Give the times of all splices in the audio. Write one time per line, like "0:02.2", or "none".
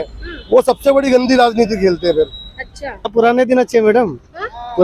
0:03.1